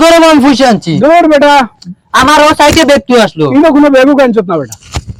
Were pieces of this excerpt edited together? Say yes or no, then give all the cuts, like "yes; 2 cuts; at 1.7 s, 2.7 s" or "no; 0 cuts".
no; 0 cuts